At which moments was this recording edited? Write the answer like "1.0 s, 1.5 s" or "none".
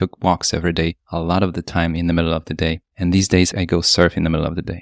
1.0 s, 2.9 s, 3.5 s